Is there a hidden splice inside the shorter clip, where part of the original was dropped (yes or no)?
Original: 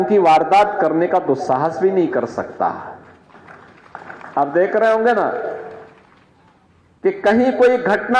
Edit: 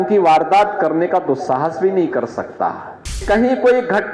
yes